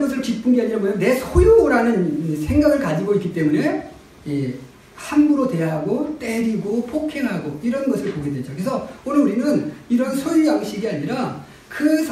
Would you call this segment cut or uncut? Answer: uncut